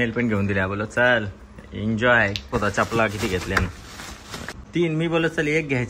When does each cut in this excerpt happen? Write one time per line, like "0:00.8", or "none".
0:02.5
0:04.5